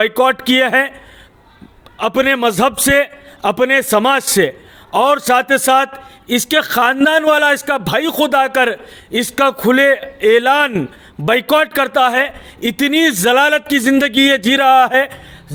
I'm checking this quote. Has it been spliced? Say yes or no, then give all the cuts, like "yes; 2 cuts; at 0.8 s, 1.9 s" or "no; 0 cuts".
no; 0 cuts